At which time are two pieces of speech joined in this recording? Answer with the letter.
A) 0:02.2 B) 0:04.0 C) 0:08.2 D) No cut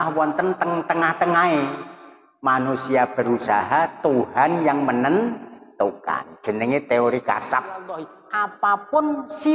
C